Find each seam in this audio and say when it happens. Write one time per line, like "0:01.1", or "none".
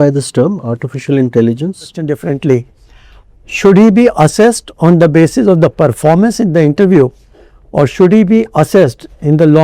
0:02.1